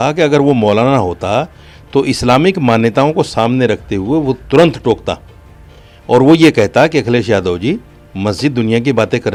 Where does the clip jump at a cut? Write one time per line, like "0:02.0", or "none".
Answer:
none